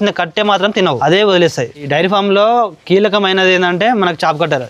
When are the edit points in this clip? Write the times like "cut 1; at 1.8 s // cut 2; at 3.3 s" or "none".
cut 1; at 1.0 s // cut 2; at 1.7 s